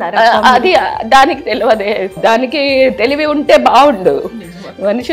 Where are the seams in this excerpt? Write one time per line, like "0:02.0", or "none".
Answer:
0:02.2